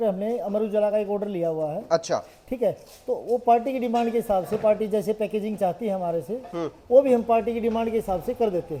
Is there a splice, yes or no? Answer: no